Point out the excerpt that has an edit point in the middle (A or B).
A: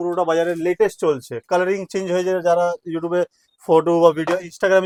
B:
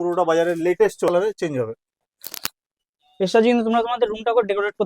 B